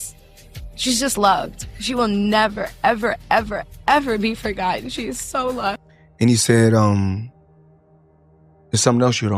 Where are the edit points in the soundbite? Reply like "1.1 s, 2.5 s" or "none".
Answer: 5.8 s